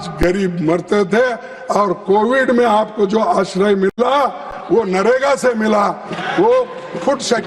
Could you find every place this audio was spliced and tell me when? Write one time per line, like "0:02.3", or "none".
none